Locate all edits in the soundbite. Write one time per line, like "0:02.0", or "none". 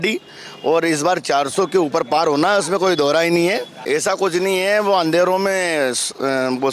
0:03.7